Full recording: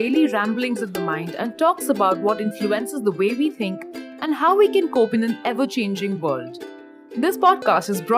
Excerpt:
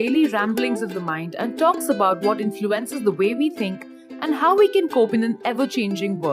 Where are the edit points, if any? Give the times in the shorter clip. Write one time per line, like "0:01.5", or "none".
none